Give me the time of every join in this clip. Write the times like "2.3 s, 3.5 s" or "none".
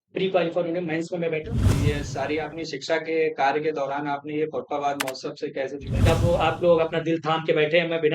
1.6 s, 6.0 s